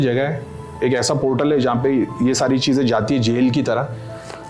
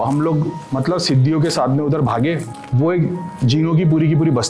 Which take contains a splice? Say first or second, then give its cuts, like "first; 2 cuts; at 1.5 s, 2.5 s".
second; 1 cut; at 2.5 s